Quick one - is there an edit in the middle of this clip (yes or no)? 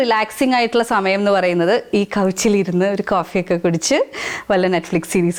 no